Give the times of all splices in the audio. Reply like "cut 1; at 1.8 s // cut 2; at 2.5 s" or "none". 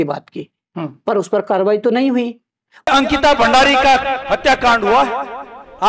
cut 1; at 2.9 s